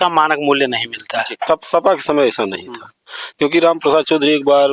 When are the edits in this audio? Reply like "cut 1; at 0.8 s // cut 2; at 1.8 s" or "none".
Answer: cut 1; at 1.4 s